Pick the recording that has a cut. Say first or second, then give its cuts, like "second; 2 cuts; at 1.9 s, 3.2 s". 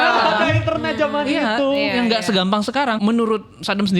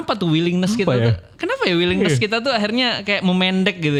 first; 1 cut; at 3.0 s